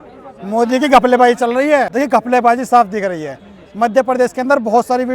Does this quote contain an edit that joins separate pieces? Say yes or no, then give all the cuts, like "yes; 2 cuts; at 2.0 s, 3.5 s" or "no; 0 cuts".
yes; 1 cut; at 1.9 s